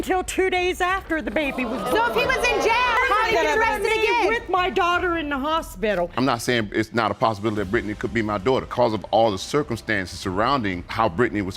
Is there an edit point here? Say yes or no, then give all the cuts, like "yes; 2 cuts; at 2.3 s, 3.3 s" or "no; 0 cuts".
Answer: yes; 4 cuts; at 3.0 s, 4.4 s, 6.1 s, 8.7 s